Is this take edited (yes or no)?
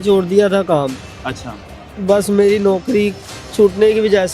no